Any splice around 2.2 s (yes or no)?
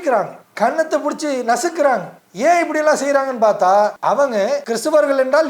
no